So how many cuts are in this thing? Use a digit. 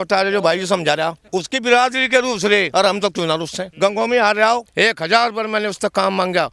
4